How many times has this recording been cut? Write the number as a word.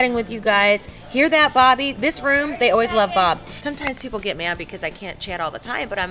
one